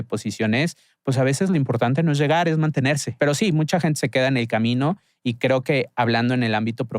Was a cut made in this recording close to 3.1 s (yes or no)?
yes